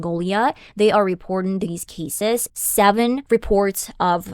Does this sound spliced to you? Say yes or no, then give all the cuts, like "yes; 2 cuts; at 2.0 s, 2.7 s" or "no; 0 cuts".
yes; 1 cut; at 2.5 s